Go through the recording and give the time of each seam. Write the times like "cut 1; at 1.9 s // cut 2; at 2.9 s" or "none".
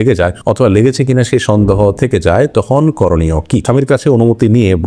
cut 1; at 3.6 s